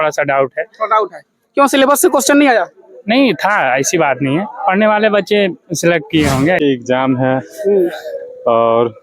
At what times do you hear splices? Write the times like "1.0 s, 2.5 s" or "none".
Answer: 6.6 s